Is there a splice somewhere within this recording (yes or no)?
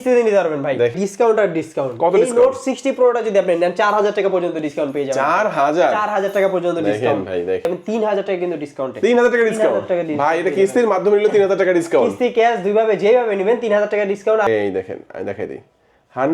yes